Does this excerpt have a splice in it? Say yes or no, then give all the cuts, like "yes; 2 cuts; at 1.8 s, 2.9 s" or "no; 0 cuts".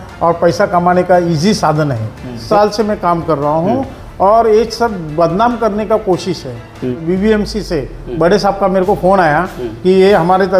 yes; 2 cuts; at 2.4 s, 6.9 s